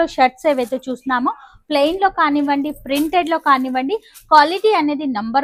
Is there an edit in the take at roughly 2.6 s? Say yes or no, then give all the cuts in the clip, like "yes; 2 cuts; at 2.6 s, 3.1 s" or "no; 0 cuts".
no; 0 cuts